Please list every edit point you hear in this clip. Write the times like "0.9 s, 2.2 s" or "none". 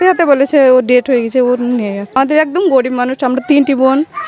2.2 s